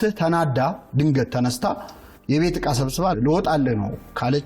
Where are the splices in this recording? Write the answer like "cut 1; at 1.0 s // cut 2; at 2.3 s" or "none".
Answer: cut 1; at 3.1 s